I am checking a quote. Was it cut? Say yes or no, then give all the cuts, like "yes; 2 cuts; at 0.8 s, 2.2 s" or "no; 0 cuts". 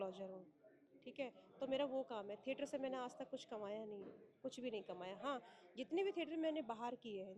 no; 0 cuts